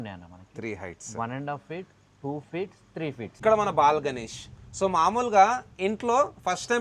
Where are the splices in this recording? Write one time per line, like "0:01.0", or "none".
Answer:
0:03.4